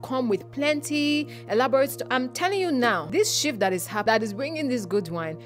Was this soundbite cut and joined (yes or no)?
yes